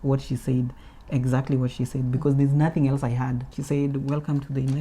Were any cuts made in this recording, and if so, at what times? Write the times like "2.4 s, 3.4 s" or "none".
3.5 s